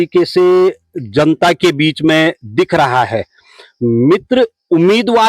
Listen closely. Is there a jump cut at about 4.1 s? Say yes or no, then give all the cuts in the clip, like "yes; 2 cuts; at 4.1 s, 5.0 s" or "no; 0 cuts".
no; 0 cuts